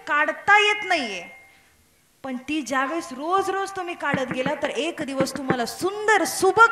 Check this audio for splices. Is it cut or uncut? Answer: uncut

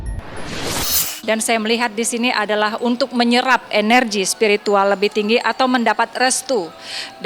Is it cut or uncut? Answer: cut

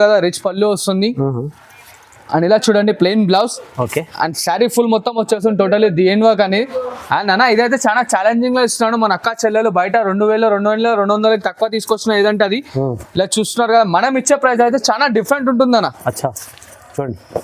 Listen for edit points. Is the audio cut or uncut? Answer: uncut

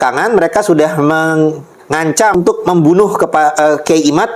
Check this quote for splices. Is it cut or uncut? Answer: cut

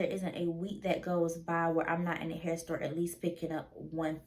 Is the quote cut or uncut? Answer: uncut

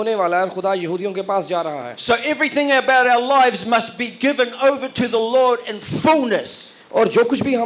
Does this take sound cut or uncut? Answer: uncut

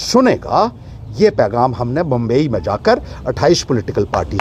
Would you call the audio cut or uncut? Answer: uncut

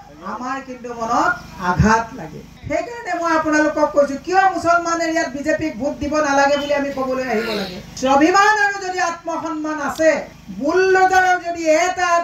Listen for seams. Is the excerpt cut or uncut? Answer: cut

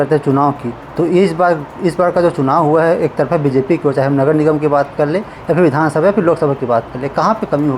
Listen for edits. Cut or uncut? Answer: uncut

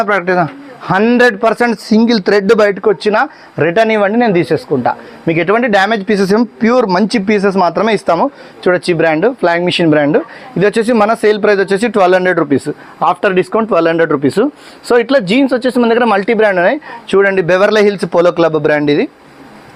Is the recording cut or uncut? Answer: uncut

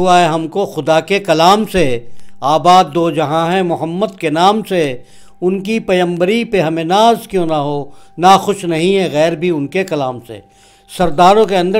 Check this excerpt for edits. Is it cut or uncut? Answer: uncut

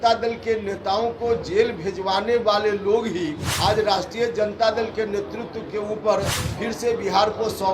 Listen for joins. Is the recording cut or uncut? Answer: cut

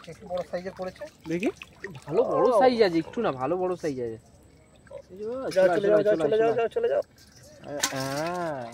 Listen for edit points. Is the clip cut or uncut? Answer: uncut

